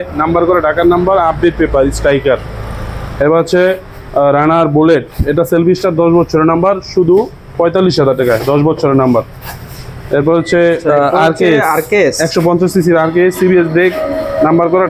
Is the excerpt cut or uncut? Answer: uncut